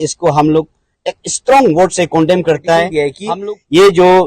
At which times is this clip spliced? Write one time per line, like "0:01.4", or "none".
0:03.1